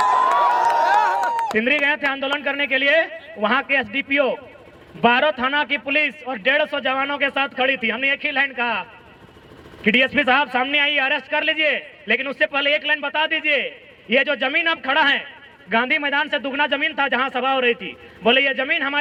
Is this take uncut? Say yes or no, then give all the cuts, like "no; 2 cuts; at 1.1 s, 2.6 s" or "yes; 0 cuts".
yes; 0 cuts